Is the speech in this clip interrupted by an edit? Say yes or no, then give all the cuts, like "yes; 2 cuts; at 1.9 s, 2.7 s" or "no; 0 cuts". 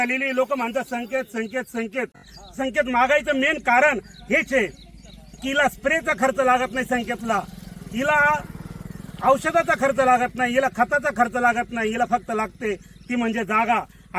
yes; 1 cut; at 2.3 s